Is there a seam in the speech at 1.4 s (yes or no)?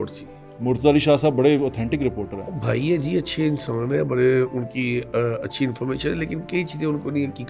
no